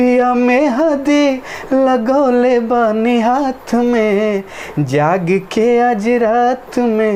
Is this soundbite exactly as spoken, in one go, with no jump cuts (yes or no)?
yes